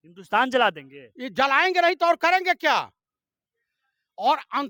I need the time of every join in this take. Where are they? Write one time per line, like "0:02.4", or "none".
none